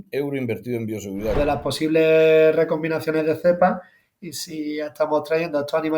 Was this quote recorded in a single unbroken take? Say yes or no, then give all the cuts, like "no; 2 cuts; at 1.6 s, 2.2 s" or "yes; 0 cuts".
no; 1 cut; at 1.4 s